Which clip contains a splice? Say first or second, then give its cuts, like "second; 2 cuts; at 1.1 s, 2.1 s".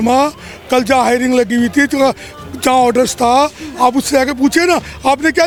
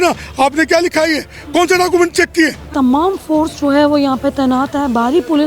second; 1 cut; at 2.6 s